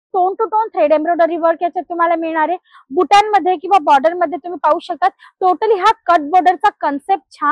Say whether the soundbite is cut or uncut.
uncut